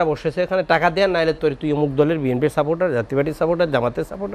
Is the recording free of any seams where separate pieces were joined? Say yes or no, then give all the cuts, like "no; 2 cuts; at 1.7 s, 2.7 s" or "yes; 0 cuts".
yes; 0 cuts